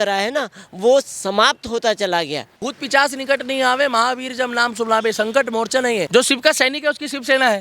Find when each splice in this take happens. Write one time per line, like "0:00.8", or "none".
0:02.6
0:06.1